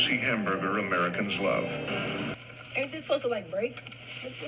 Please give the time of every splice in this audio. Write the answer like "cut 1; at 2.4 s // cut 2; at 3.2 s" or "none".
cut 1; at 2.3 s